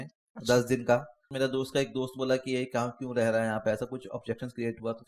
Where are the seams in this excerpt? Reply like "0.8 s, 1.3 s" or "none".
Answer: 1.3 s